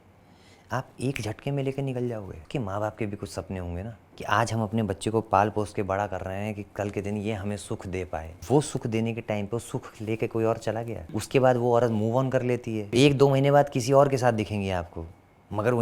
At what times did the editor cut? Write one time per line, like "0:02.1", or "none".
0:02.4
0:04.0
0:08.4
0:11.0
0:12.9